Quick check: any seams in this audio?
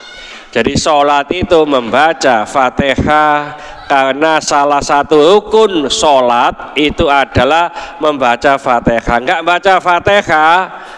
no; 0 cuts

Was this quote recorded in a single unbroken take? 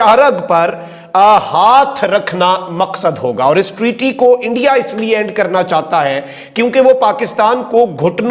yes; 0 cuts

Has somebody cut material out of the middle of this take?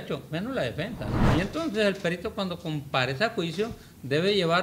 yes; 1 cut; at 1.2 s

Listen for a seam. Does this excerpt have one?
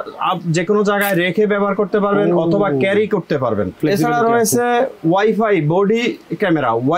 yes; 1 cut; at 3.8 s

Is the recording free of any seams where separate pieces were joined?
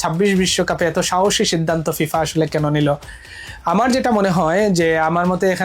yes; 0 cuts

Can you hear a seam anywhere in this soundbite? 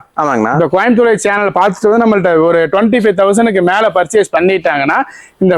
no; 0 cuts

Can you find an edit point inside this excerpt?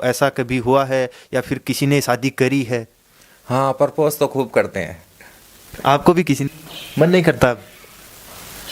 yes; 1 cut; at 6.5 s

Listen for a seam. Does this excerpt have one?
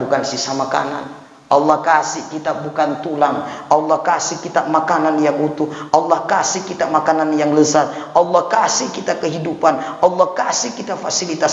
no; 0 cuts

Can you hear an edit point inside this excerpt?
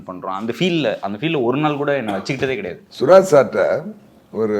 yes; 1 cut; at 2.8 s

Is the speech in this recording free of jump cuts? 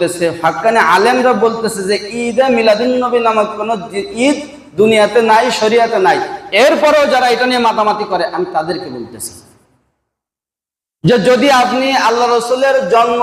yes; 0 cuts

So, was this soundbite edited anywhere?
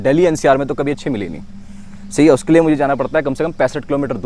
no; 0 cuts

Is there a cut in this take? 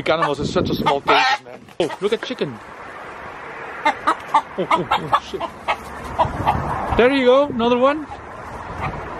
yes; 1 cut; at 1.8 s

